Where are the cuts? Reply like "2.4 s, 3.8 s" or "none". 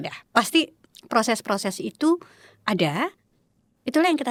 none

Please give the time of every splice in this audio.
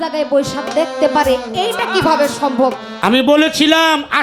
2.6 s

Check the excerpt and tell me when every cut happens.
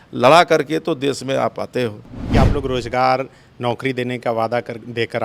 2.3 s

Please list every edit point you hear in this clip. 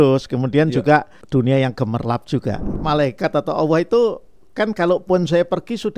1.2 s, 2.7 s

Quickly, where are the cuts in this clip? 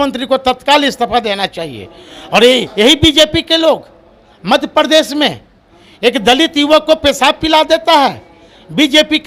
none

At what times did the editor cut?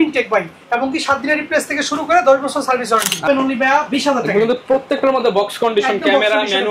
3.3 s

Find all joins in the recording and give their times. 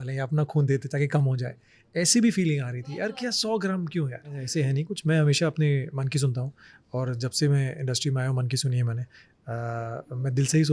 4.4 s

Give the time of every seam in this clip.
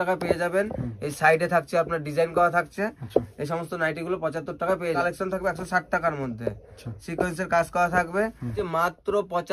5.0 s, 8.6 s

